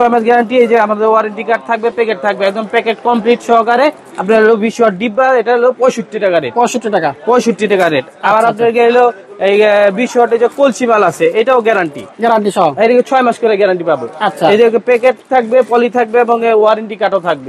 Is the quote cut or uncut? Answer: uncut